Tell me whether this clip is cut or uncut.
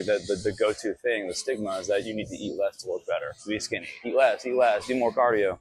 uncut